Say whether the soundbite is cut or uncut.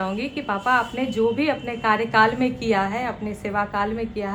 uncut